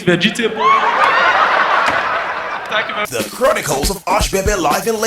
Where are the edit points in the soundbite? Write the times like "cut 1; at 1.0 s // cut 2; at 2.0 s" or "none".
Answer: cut 1; at 3.1 s